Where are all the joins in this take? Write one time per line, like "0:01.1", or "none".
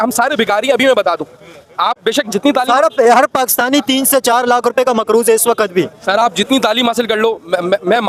none